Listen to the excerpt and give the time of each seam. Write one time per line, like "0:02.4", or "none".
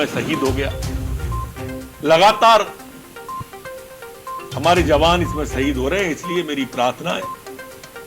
0:00.7
0:01.9
0:03.0
0:04.5
0:07.3